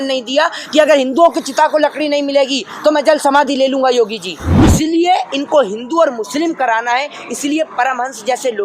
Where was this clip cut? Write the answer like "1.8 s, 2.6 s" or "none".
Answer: 4.7 s